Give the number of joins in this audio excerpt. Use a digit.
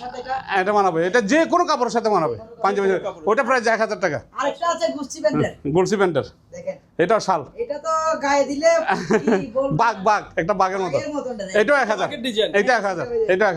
0